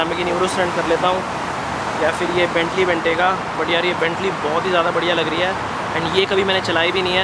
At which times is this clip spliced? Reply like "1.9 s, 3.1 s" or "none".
none